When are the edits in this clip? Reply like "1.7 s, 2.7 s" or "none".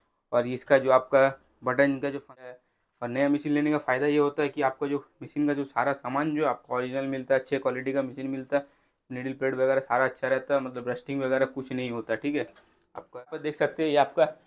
2.5 s, 13.5 s